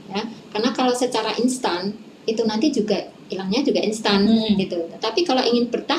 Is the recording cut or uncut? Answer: uncut